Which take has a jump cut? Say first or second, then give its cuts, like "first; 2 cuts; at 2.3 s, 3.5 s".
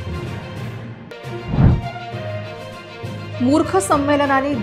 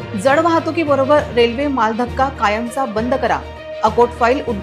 first; 1 cut; at 1.0 s